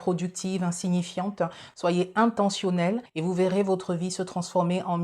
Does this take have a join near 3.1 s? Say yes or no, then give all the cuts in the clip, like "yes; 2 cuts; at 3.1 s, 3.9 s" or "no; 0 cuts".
yes; 1 cut; at 3.1 s